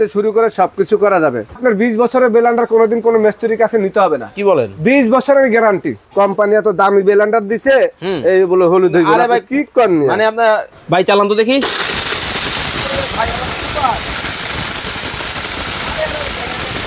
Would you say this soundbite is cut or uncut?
cut